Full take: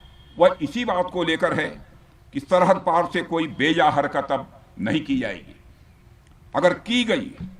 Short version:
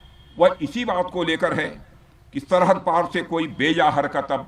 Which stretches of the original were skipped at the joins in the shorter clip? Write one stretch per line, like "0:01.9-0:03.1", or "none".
none